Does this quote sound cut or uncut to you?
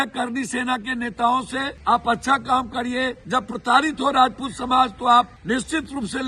cut